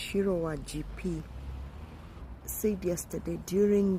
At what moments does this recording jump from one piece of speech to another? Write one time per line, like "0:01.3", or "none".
0:02.2